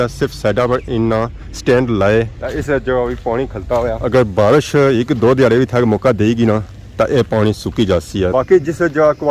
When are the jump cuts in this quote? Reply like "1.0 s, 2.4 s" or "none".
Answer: 8.3 s